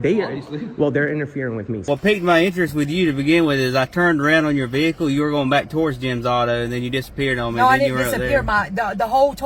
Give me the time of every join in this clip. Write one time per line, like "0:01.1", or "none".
0:01.8
0:03.0